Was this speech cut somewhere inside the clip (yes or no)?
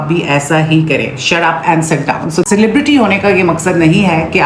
yes